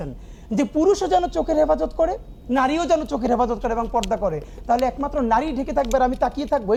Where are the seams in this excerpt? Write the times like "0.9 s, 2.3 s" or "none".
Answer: none